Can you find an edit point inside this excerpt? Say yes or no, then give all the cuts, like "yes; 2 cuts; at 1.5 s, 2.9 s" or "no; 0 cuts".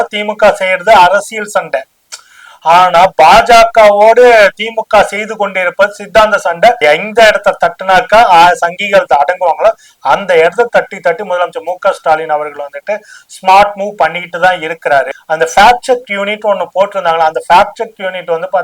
yes; 2 cuts; at 6.8 s, 15.1 s